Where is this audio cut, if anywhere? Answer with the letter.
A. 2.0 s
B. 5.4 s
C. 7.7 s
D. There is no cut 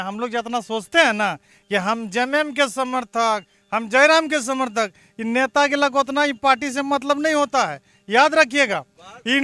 D